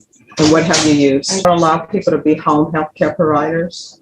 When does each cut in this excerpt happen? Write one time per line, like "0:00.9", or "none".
0:01.4